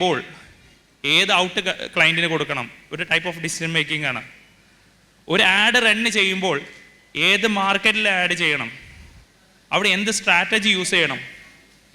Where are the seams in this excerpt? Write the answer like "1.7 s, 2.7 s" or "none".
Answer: none